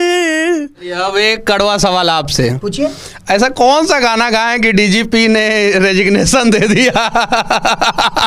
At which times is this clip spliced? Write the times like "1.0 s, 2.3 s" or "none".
1.0 s